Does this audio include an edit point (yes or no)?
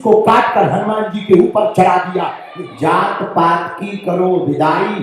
yes